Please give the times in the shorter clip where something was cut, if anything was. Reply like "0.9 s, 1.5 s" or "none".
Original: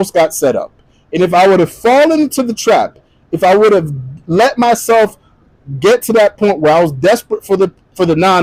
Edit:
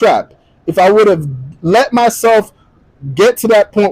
none